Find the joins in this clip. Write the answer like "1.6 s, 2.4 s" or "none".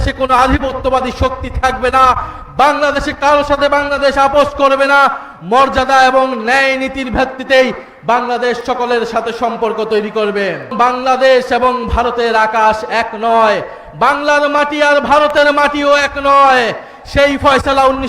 10.7 s